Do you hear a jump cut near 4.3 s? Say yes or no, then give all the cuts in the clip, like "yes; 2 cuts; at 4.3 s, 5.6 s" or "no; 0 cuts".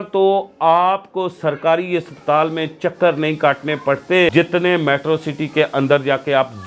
yes; 1 cut; at 4.3 s